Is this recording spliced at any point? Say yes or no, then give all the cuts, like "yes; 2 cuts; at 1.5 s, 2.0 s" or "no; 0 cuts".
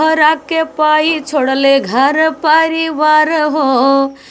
no; 0 cuts